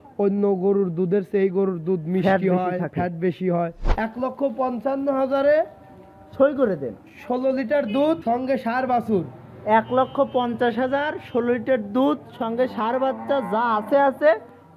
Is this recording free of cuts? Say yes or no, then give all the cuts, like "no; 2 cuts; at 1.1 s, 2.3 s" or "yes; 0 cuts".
no; 2 cuts; at 3.8 s, 8.2 s